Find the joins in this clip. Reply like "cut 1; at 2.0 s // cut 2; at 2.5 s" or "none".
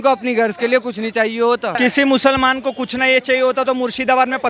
cut 1; at 1.8 s